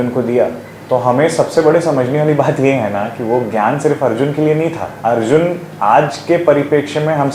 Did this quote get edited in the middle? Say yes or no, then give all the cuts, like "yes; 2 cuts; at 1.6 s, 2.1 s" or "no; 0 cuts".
no; 0 cuts